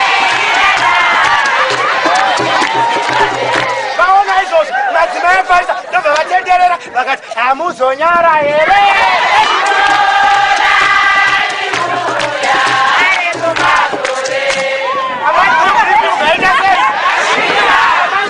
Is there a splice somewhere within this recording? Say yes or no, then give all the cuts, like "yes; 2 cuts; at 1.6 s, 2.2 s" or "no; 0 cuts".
no; 0 cuts